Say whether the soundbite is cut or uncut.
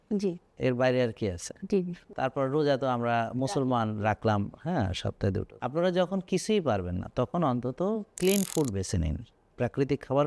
cut